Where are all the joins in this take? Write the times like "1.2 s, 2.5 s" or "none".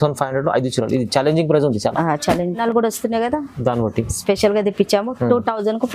2.6 s